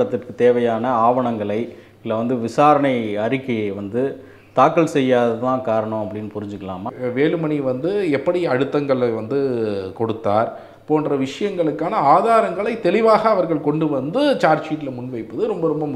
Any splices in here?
yes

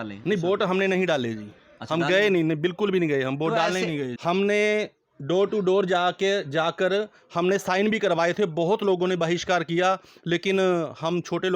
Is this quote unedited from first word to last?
no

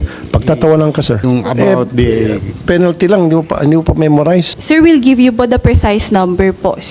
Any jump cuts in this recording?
yes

